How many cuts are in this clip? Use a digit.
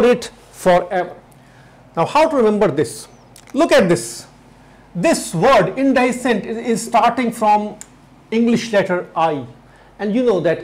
1